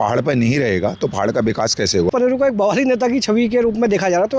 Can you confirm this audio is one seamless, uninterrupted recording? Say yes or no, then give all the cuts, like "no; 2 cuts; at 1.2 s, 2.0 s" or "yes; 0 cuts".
no; 1 cut; at 2.1 s